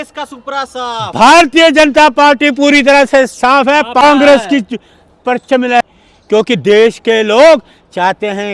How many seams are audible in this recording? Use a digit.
0